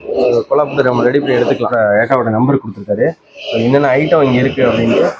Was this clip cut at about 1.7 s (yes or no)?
yes